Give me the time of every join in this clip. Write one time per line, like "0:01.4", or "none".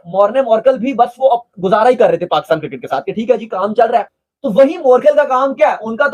0:04.2